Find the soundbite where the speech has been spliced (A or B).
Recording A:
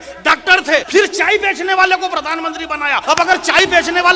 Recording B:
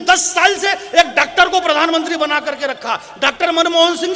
A